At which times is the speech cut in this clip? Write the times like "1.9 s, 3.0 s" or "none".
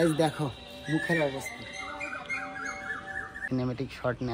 3.4 s